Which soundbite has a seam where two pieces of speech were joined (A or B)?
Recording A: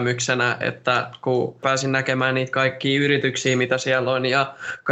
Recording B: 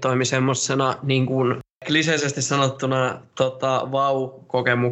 A